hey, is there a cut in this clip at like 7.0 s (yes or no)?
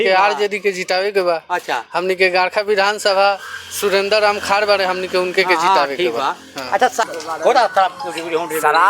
yes